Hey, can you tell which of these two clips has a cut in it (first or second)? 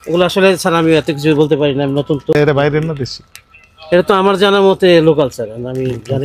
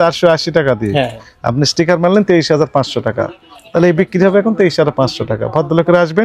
first